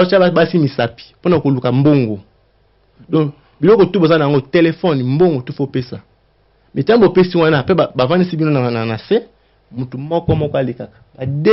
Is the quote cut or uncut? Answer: uncut